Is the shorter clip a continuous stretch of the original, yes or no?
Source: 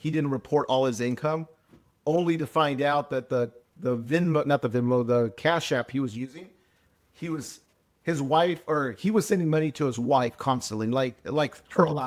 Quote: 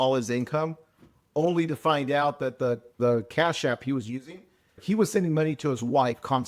no